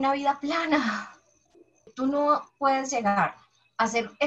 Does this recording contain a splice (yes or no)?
yes